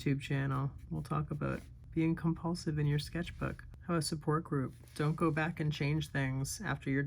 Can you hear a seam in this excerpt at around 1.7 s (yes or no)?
yes